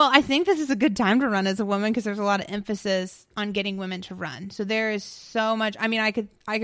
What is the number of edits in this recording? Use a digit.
0